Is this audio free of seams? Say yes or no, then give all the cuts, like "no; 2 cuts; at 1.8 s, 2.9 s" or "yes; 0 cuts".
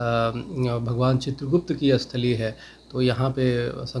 yes; 0 cuts